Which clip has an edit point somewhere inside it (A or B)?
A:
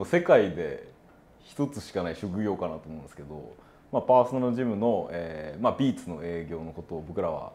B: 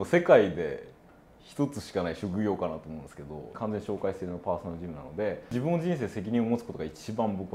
B